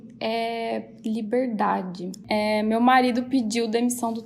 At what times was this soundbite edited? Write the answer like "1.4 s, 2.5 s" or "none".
2.2 s